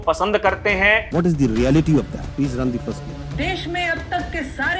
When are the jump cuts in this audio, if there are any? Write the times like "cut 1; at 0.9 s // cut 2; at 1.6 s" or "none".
cut 1; at 1.0 s // cut 2; at 2.2 s // cut 3; at 3.1 s

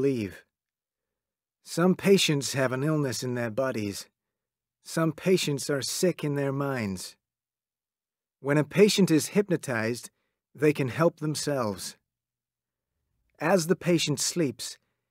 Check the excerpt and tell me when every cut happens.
cut 1; at 11.4 s

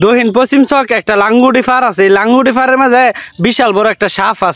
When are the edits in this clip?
none

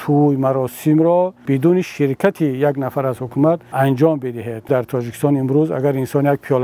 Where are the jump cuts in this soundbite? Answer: cut 1; at 1.4 s // cut 2; at 3.7 s // cut 3; at 4.7 s

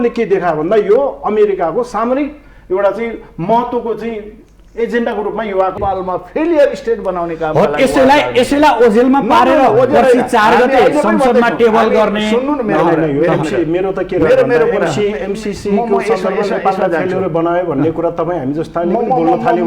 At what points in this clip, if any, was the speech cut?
cut 1; at 5.8 s

